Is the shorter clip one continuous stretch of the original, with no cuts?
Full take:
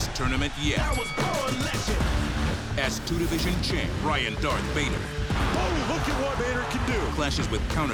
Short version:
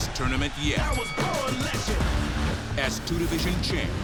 yes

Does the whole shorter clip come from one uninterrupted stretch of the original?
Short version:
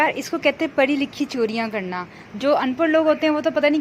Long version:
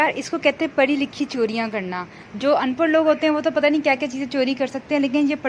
yes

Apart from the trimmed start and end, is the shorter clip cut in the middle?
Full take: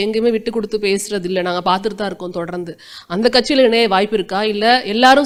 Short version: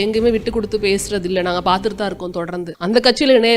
yes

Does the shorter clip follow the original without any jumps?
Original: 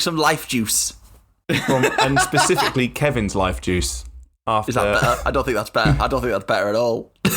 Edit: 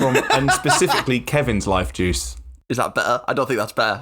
no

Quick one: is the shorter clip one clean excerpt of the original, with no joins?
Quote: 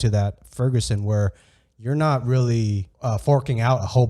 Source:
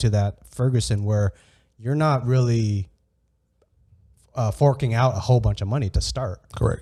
no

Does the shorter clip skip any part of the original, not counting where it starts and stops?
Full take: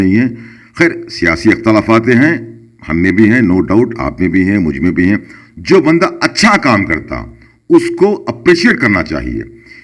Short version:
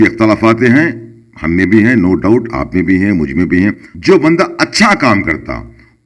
yes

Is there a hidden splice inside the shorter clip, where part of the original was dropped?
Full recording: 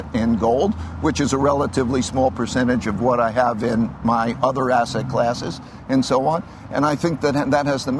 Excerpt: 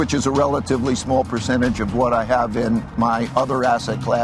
no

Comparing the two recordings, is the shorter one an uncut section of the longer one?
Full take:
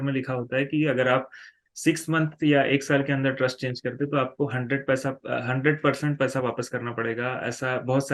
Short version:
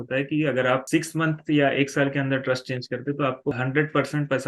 no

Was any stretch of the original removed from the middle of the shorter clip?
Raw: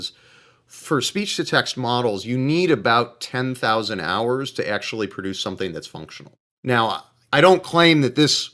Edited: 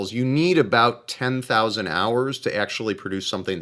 no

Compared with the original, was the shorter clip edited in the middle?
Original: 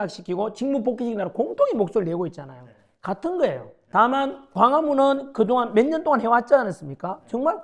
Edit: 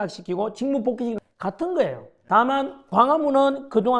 yes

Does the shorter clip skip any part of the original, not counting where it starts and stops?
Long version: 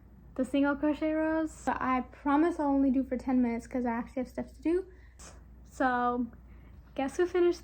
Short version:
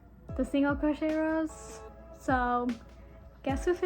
yes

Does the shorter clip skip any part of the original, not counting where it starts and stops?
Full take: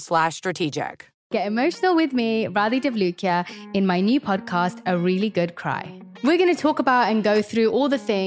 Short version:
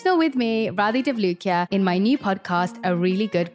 yes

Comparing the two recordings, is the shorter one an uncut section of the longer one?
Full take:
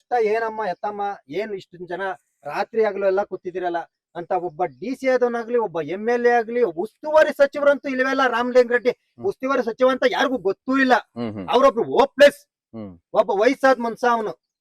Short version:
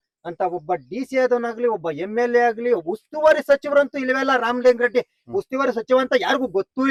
yes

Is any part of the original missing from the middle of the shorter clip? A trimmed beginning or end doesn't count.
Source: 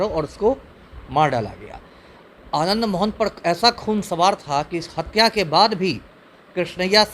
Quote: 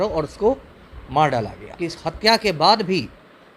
yes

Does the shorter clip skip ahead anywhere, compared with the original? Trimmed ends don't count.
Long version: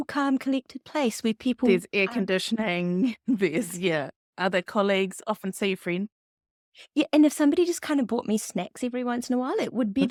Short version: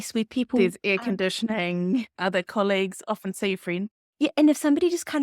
yes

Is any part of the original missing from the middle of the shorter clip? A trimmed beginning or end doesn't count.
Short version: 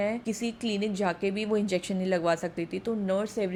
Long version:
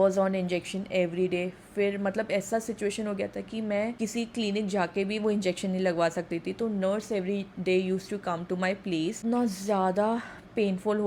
no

